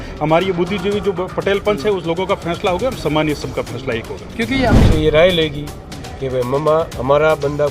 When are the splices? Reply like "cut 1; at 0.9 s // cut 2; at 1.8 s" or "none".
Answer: cut 1; at 4.8 s